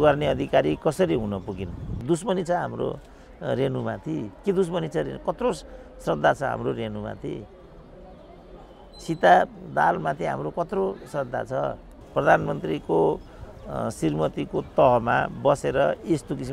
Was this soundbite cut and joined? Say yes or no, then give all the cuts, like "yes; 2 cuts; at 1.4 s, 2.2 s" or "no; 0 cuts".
yes; 2 cuts; at 2.0 s, 11.9 s